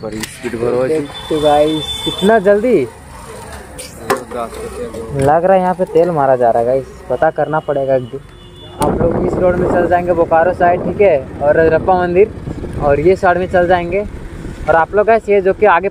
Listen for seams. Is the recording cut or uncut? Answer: cut